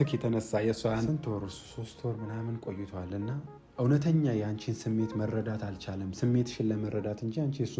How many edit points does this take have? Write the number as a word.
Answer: one